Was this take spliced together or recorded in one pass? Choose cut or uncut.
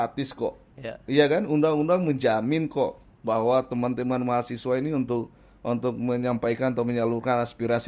uncut